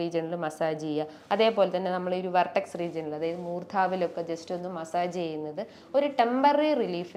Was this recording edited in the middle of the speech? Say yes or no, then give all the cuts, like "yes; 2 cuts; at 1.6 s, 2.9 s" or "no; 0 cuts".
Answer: no; 0 cuts